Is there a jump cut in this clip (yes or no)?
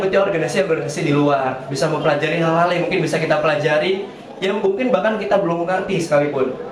no